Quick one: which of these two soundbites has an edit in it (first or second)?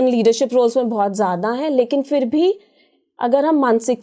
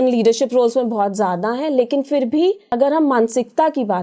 second